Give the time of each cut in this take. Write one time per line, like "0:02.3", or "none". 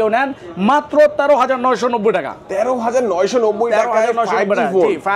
none